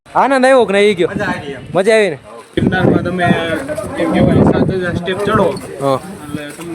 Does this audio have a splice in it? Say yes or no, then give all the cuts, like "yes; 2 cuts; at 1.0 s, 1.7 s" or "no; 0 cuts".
yes; 1 cut; at 2.6 s